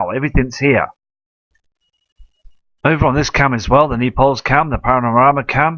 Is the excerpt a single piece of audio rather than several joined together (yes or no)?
no